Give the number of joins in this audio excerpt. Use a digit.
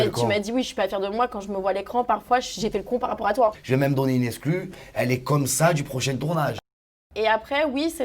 2